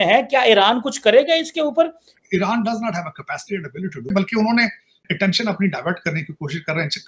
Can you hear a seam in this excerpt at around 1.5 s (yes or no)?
no